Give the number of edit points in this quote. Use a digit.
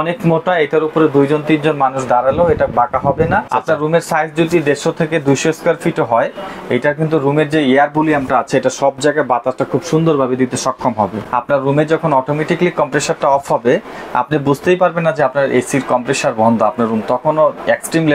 2